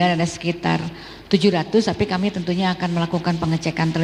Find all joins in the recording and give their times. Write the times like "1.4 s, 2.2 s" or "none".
none